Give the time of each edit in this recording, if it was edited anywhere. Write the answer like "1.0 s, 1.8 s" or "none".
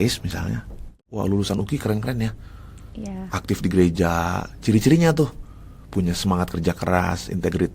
1.0 s